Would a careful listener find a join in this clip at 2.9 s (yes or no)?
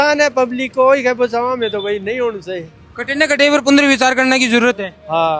no